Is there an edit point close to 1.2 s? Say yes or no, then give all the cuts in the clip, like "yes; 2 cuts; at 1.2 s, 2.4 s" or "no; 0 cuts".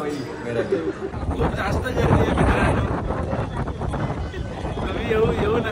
yes; 1 cut; at 1.2 s